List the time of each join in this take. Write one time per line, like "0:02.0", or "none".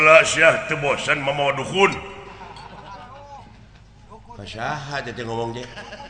none